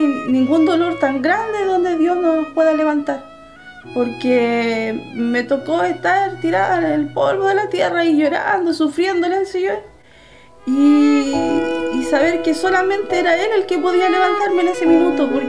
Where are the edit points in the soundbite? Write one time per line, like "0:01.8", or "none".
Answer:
none